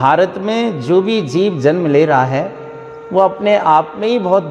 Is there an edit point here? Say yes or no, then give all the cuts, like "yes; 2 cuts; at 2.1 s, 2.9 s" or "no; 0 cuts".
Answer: no; 0 cuts